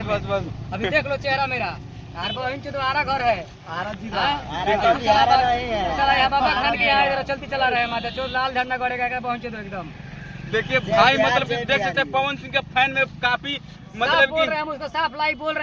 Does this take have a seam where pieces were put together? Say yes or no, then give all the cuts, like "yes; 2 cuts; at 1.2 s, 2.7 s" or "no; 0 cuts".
no; 0 cuts